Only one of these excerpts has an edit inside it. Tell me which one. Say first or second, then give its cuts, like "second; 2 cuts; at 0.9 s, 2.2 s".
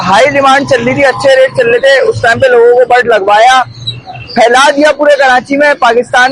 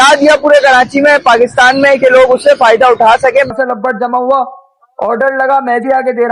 second; 1 cut; at 3.5 s